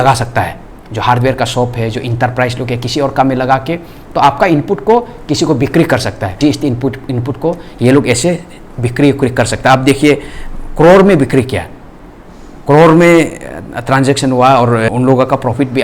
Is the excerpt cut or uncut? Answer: cut